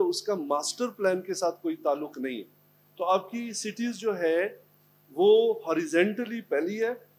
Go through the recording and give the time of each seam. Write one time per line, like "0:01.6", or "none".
none